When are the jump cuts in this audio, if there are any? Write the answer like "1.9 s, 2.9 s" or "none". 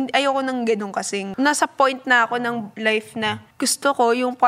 1.3 s, 2.7 s, 3.5 s